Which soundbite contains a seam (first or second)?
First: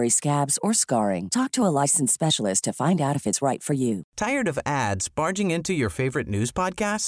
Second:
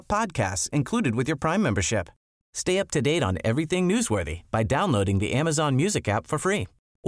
first